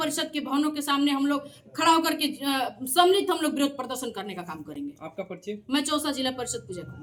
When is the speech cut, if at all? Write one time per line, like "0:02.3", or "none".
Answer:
none